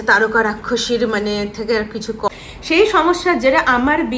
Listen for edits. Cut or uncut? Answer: cut